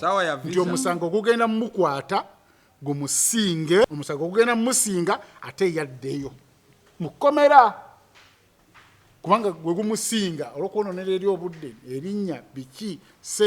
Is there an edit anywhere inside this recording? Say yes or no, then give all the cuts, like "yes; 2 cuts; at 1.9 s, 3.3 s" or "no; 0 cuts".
yes; 1 cut; at 3.9 s